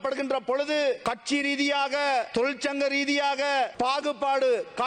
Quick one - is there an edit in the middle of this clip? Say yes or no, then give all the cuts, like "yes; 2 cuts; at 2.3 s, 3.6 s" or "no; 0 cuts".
yes; 3 cuts; at 1.0 s, 2.3 s, 3.7 s